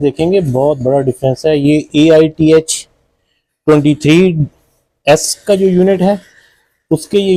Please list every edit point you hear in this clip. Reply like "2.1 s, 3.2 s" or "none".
none